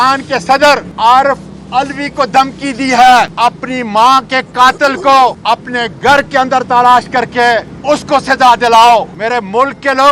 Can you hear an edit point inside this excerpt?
yes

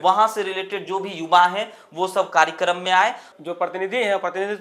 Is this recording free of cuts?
no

